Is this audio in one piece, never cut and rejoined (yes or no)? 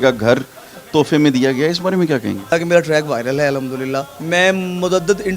no